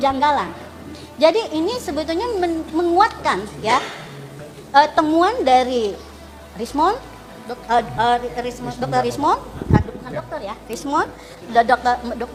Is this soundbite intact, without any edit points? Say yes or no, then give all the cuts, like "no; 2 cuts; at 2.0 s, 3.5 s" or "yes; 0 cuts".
yes; 0 cuts